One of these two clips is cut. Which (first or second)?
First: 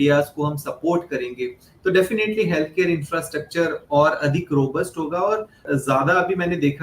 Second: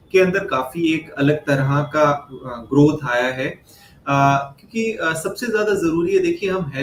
first